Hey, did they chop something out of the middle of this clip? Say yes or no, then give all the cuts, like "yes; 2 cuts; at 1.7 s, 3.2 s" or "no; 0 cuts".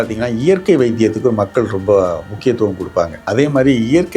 yes; 1 cut; at 3.2 s